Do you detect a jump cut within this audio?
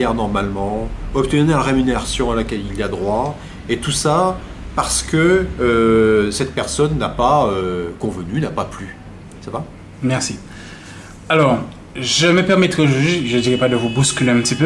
no; 0 cuts

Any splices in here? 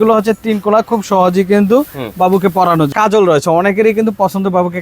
yes; 1 cut; at 2.9 s

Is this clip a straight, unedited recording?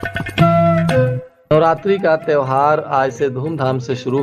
no; 1 cut; at 1.3 s

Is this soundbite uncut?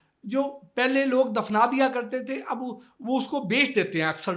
yes; 0 cuts

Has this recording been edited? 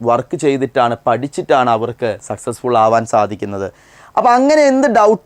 no; 0 cuts

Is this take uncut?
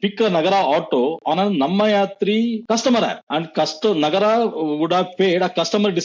no; 2 cuts; at 2.6 s, 3.2 s

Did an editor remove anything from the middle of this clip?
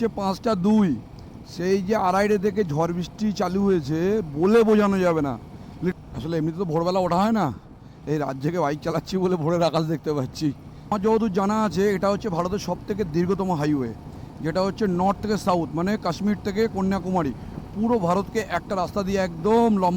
yes; 2 cuts; at 6.0 s, 10.9 s

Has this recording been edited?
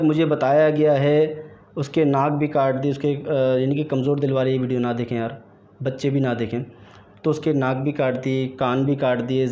no; 0 cuts

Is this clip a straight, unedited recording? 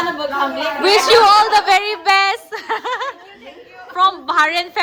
yes; 0 cuts

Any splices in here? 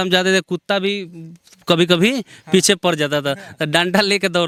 no; 0 cuts

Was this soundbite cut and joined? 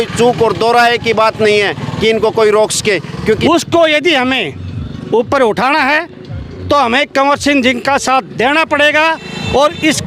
yes; 1 cut; at 3.4 s

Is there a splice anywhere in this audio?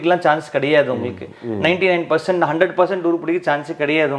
no; 0 cuts

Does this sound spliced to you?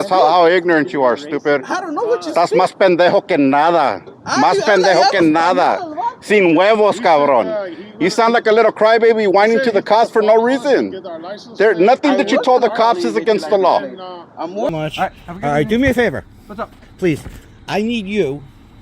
yes; 1 cut; at 14.7 s

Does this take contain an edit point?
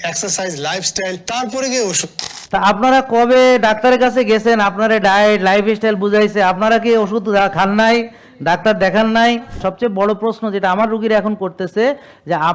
yes; 1 cut; at 9.6 s

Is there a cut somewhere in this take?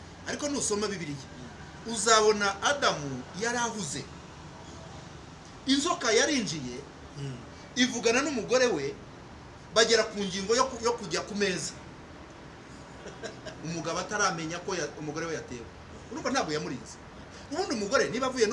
no; 0 cuts

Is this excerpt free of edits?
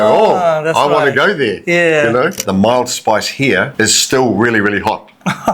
no; 2 cuts; at 2.4 s, 3.7 s

